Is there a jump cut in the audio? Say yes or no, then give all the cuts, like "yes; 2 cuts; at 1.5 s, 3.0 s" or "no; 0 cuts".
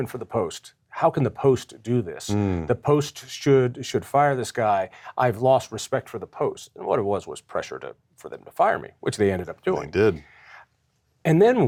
no; 0 cuts